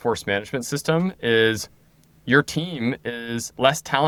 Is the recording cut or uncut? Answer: uncut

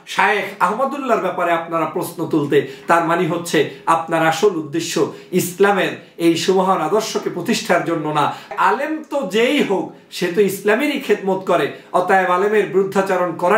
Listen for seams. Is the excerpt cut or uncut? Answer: cut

